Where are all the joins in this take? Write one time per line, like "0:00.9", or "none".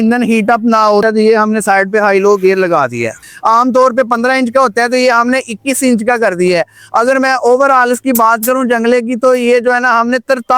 0:01.0
0:03.2